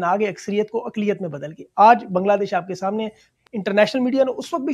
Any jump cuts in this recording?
yes; 1 cut; at 3.1 s

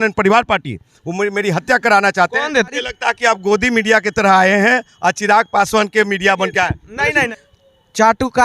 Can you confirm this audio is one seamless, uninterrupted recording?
no; 2 cuts; at 2.7 s, 7.3 s

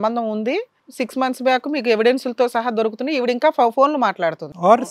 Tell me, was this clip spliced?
no; 0 cuts

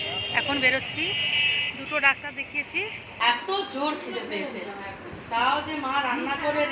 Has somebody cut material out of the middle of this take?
yes; 1 cut; at 3.2 s

